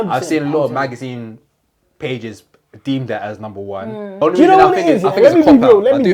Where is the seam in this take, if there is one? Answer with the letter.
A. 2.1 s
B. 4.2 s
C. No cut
B